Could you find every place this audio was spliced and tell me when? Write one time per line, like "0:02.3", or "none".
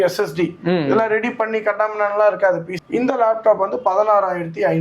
0:03.2